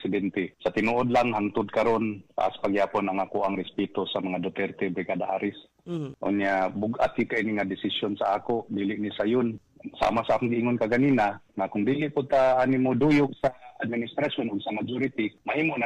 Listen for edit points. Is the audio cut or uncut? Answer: cut